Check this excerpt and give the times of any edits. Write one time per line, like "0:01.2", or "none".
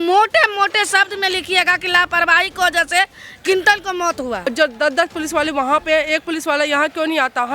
0:04.5